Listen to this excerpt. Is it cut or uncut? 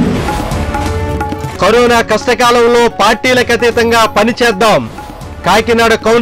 cut